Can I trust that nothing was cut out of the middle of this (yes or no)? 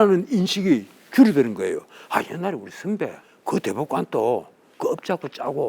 no